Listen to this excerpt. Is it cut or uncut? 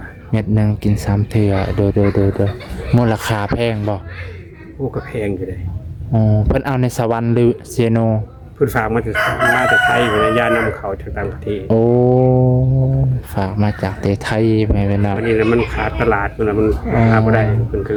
uncut